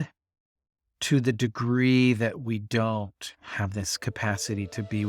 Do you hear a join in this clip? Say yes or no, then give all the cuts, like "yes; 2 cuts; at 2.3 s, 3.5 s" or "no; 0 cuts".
no; 0 cuts